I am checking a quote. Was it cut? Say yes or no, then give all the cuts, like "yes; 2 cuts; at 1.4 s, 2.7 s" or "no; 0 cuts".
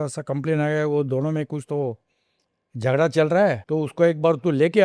yes; 1 cut; at 3.6 s